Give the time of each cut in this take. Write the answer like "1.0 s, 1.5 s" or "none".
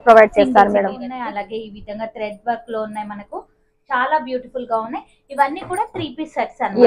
1.0 s